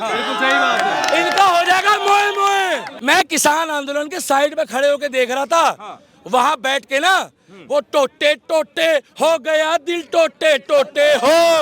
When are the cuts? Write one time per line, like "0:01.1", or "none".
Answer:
0:02.9